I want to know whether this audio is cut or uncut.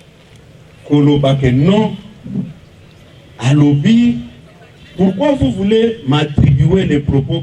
uncut